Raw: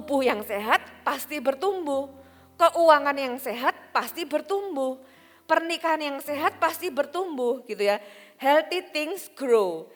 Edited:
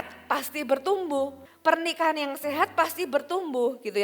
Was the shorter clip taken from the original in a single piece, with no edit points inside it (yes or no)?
no